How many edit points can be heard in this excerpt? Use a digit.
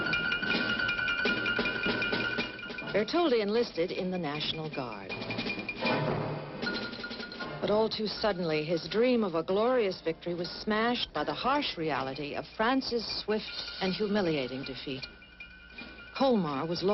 1